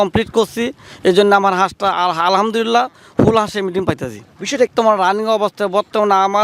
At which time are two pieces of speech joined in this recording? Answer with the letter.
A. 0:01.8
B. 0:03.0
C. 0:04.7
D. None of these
C